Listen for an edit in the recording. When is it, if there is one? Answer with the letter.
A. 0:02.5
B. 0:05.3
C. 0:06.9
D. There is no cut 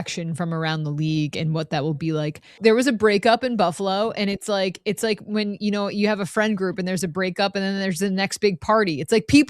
A